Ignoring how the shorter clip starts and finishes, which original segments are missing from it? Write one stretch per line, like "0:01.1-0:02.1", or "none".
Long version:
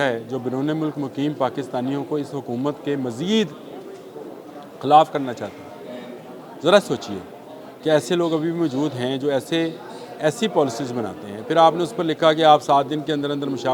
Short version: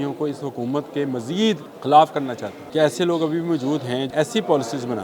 0:03.6-0:04.7
0:05.5-0:07.6
0:09.2-0:10.1